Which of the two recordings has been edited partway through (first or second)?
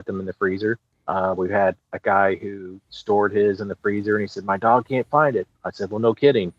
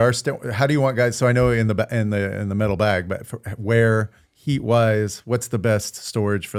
first